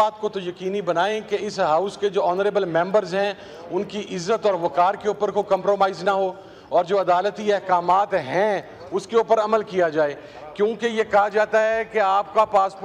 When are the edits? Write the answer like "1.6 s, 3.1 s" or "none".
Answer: none